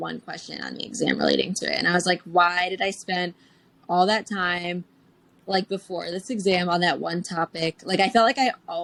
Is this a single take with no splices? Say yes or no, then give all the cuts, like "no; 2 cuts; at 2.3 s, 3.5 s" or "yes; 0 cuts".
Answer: yes; 0 cuts